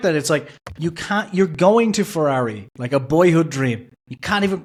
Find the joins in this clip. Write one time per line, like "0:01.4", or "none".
none